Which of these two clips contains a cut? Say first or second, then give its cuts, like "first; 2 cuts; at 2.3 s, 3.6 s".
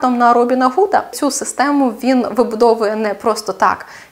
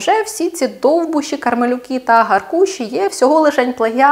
first; 1 cut; at 1.2 s